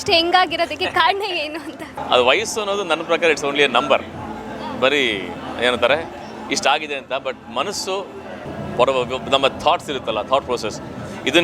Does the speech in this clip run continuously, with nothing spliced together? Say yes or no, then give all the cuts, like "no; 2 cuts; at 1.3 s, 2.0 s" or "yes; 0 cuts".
no; 1 cut; at 1.9 s